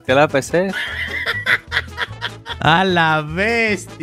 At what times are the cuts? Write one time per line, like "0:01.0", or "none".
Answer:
0:02.6